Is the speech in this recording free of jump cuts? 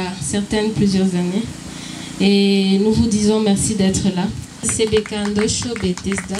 no; 1 cut; at 4.7 s

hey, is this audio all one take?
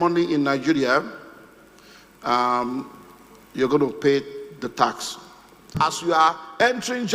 no; 1 cut; at 5.8 s

